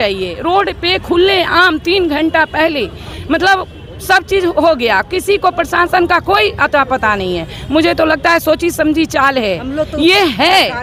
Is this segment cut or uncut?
uncut